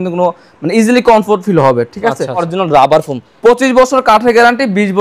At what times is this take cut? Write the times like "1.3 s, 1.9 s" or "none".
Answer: 2.5 s, 3.2 s